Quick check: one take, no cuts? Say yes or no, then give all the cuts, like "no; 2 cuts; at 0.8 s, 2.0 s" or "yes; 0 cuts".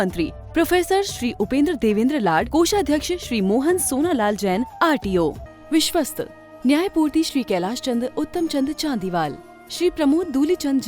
no; 1 cut; at 5.5 s